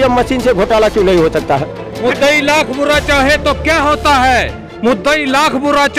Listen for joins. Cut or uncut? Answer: cut